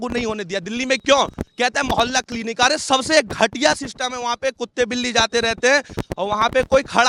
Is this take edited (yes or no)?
no